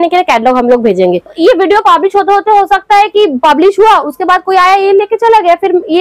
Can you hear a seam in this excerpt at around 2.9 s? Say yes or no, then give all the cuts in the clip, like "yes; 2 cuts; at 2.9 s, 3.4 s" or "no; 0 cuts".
no; 1 cut; at 1.4 s